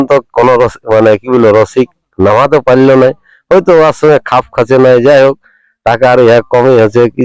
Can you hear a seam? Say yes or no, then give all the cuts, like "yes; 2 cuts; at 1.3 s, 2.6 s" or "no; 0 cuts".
no; 0 cuts